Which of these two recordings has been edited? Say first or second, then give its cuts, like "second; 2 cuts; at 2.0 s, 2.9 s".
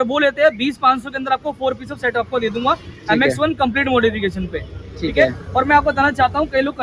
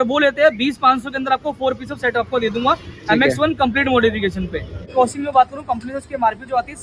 second; 1 cut; at 4.8 s